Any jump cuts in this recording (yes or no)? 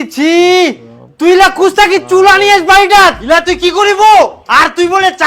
yes